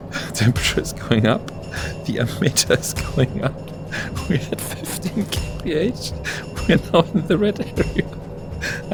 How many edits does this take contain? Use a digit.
0